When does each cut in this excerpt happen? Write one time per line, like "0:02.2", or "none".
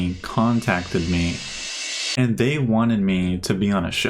none